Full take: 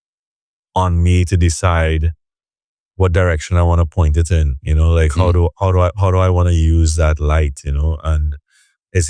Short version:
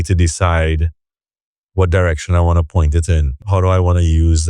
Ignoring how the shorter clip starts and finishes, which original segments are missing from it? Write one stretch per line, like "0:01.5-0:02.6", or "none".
0:04.7-0:05.9